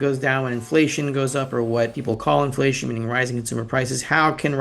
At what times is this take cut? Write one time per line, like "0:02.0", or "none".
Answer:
0:02.0

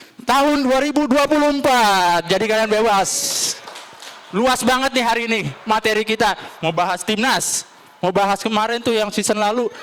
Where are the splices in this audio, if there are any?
none

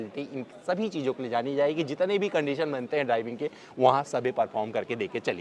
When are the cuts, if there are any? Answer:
none

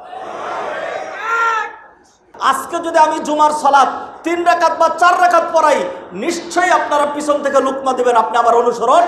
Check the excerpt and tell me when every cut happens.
0:02.3

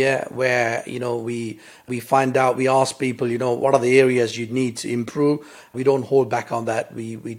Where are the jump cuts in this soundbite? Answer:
0:01.8
0:03.6
0:05.7

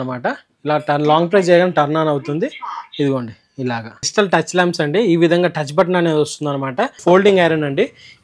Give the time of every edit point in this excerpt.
0:04.0
0:07.0

